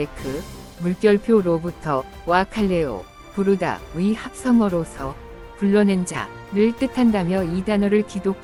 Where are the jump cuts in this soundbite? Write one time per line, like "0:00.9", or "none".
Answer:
none